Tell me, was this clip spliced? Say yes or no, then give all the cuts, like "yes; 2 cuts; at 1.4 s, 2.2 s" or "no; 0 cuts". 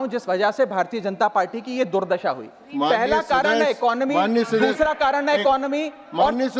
no; 0 cuts